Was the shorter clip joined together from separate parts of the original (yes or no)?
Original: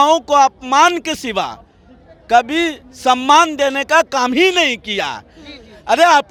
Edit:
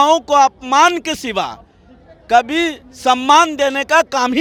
no